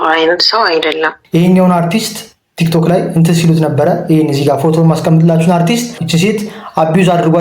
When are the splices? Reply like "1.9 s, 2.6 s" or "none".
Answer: 1.2 s, 6.0 s